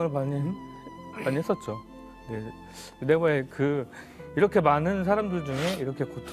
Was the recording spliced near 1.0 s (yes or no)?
no